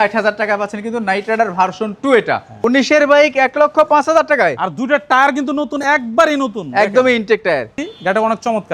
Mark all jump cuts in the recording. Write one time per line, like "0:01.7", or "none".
0:02.6
0:07.9